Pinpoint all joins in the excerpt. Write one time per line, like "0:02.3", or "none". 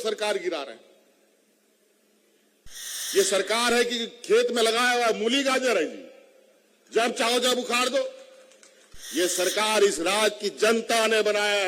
0:02.7